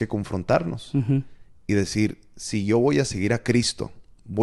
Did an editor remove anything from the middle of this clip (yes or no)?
no